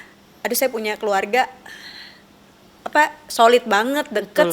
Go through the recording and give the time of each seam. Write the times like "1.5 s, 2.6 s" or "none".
none